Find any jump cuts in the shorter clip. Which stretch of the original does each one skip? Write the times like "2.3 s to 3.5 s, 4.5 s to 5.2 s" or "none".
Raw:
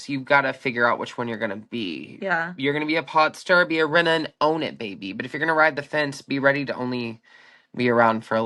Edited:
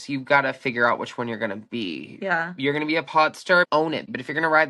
3.7 s to 4.7 s

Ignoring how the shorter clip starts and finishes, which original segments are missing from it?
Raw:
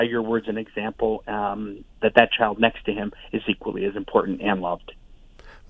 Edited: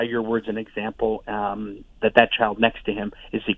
none

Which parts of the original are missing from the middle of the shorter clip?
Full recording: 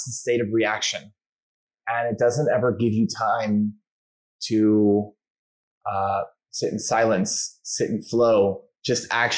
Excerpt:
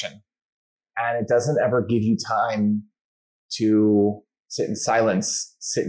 5.3 s to 6.4 s

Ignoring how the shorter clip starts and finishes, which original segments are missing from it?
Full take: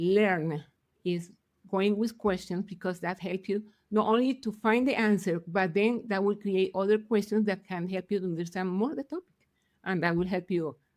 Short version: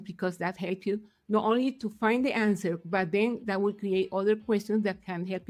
none

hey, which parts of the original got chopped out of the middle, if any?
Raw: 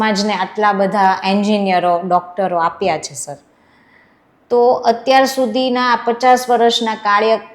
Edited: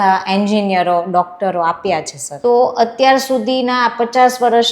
3.2 s to 4.3 s

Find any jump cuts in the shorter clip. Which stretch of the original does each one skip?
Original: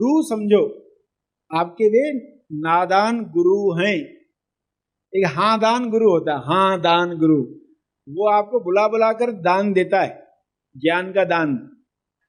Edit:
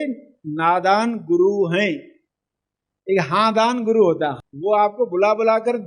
6.4 s to 7.9 s

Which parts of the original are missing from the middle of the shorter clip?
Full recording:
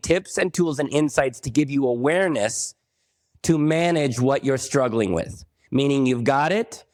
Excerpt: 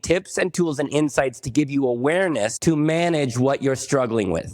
2.6 s to 3.4 s

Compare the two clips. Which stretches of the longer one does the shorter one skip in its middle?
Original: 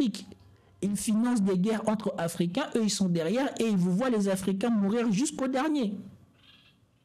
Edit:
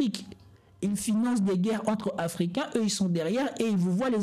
none

